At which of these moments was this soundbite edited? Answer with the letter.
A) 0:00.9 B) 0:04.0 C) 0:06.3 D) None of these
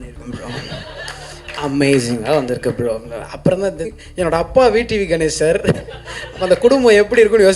B